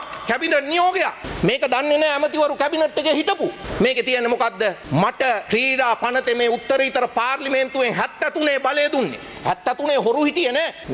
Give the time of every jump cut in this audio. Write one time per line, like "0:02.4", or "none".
none